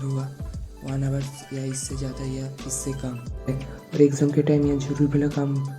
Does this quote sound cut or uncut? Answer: cut